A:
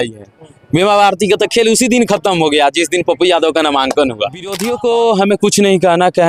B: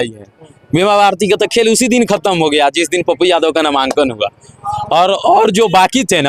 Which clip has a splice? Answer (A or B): A